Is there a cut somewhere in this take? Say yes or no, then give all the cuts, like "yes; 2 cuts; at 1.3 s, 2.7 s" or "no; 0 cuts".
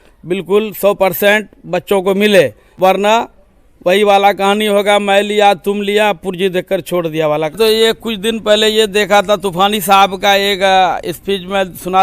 yes; 2 cuts; at 2.6 s, 7.6 s